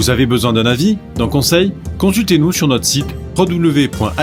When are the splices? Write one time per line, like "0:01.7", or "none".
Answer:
none